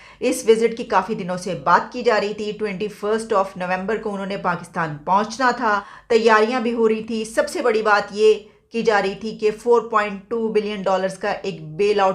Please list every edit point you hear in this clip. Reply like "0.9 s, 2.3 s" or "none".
5.9 s